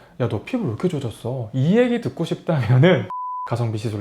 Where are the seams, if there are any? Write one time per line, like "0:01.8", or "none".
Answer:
0:03.1